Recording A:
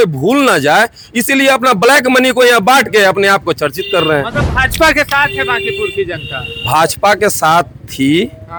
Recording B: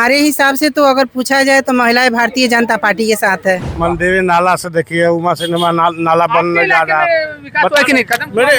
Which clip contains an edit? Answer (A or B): B